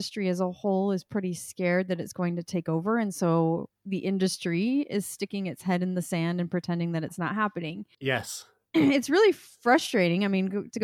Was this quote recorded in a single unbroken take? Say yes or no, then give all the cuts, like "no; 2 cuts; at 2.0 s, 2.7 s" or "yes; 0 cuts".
yes; 0 cuts